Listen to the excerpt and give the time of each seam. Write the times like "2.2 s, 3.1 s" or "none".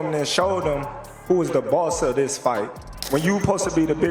3.0 s